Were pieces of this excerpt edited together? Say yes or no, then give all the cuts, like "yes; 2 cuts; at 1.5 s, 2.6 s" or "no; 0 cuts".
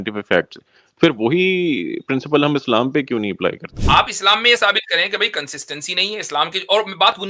yes; 1 cut; at 3.7 s